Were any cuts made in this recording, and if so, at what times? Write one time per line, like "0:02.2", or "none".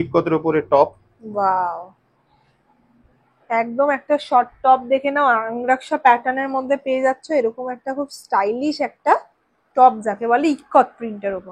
none